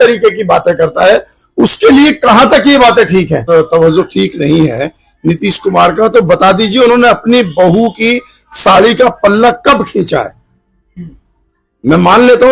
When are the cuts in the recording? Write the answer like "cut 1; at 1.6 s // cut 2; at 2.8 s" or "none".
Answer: cut 1; at 3.4 s

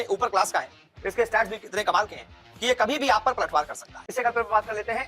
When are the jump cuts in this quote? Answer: cut 1; at 4.1 s

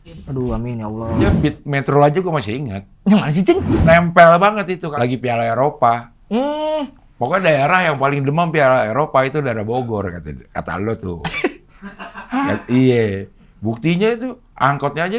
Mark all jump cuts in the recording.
cut 1; at 1.3 s // cut 2; at 3.7 s // cut 3; at 4.9 s

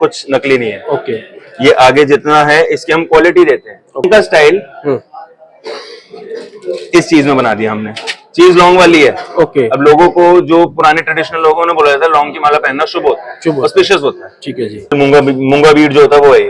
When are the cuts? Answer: cut 1; at 4.0 s // cut 2; at 14.9 s

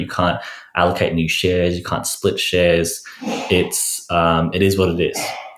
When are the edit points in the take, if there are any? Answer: none

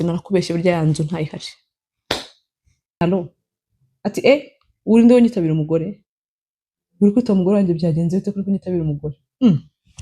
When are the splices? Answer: cut 1; at 3.0 s

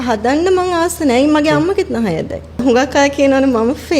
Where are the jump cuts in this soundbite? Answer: cut 1; at 2.6 s

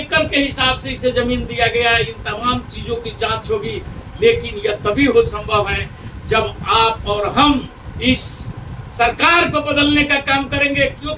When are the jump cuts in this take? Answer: none

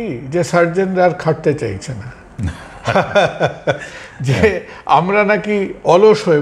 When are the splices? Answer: none

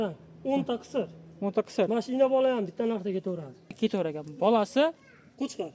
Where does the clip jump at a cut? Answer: cut 1; at 3.7 s

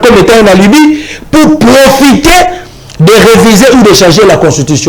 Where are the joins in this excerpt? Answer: none

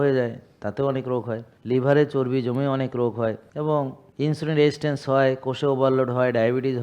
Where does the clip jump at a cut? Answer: cut 1; at 1.5 s // cut 2; at 3.4 s // cut 3; at 4.0 s

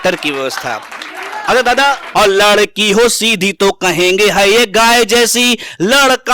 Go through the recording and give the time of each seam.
cut 1; at 2.0 s

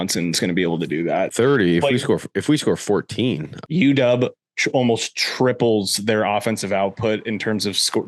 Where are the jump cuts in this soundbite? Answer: cut 1; at 3.5 s

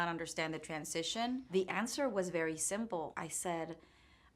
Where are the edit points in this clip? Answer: cut 1; at 1.5 s // cut 2; at 3.1 s

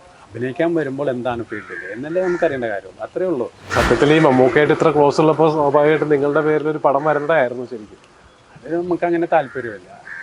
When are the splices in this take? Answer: cut 1; at 3.6 s

